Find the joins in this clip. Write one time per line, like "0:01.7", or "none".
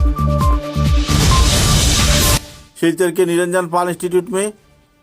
0:02.6